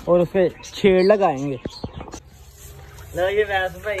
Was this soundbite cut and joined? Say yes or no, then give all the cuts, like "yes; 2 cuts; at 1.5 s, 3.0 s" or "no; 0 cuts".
yes; 1 cut; at 2.2 s